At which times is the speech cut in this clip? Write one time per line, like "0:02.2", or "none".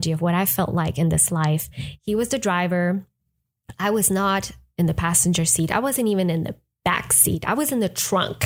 none